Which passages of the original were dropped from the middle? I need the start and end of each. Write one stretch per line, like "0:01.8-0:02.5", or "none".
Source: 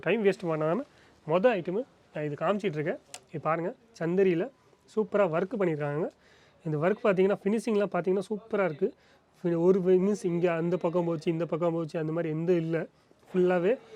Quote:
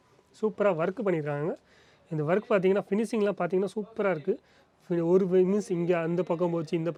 none